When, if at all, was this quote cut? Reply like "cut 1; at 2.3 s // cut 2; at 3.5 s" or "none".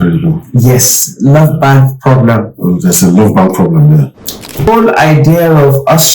cut 1; at 4.7 s